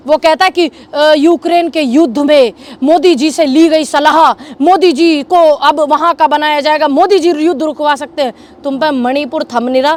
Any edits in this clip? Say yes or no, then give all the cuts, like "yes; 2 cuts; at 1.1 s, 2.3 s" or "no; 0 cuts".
no; 0 cuts